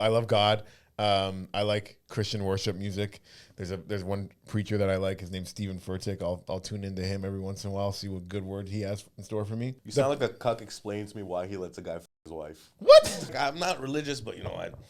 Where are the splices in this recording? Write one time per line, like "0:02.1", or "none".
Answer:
0:09.8
0:13.3